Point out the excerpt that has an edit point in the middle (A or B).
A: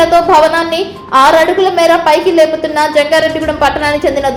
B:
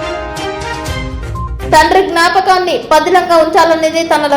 B